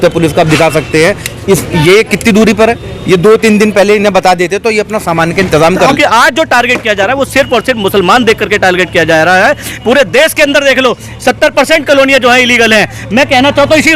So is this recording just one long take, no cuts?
no; 1 cut; at 5.9 s

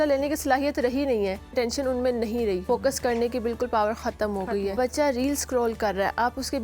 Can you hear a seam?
yes; 3 cuts; at 1.5 s, 2.6 s, 4.7 s

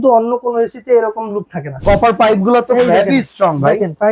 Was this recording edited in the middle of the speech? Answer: yes; 1 cut; at 1.6 s

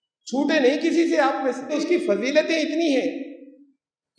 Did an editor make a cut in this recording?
yes; 1 cut; at 1.8 s

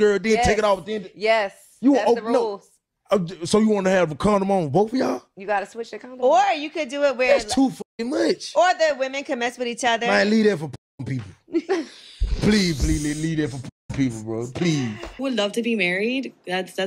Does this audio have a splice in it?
yes; 1 cut; at 15.0 s

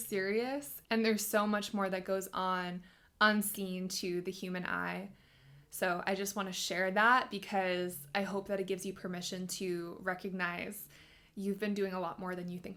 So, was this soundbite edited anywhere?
no; 0 cuts

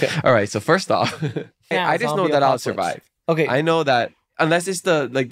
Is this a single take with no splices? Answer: no; 1 cut; at 1.7 s

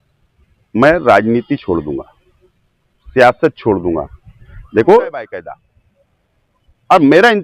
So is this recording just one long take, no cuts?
no; 1 cut; at 5.2 s

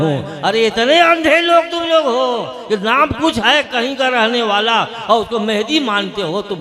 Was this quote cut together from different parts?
no; 0 cuts

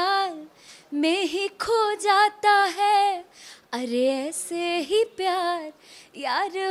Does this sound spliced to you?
no; 0 cuts

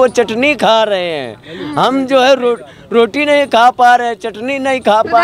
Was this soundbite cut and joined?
no; 0 cuts

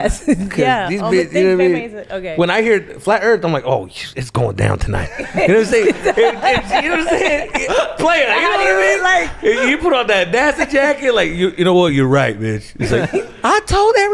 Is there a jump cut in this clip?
no; 0 cuts

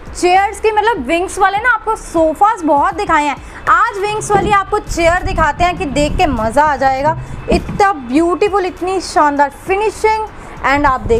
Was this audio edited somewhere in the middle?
no; 0 cuts

